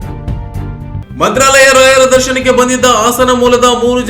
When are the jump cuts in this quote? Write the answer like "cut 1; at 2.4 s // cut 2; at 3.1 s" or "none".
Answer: cut 1; at 1.0 s